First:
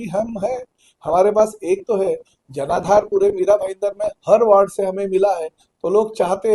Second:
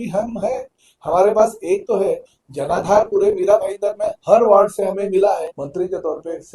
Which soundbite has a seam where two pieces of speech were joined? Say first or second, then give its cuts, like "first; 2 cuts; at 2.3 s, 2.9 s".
second; 1 cut; at 5.6 s